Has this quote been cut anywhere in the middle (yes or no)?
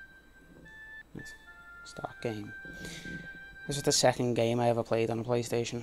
no